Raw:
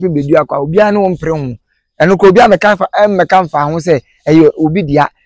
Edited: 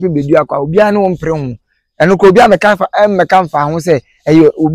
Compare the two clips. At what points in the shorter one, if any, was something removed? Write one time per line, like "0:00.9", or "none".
none